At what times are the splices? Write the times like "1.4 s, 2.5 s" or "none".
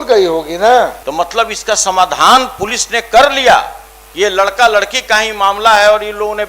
1.0 s